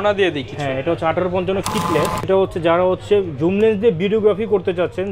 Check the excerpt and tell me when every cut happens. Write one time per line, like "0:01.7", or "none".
0:02.2